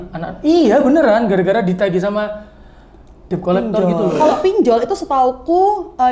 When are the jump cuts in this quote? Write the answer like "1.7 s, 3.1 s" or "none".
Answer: 4.2 s